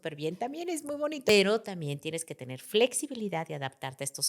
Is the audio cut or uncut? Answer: cut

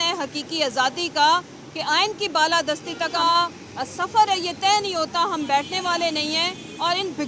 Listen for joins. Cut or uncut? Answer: cut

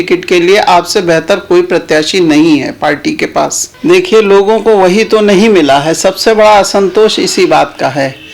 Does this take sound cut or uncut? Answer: cut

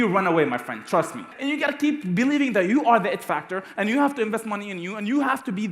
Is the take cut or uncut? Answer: cut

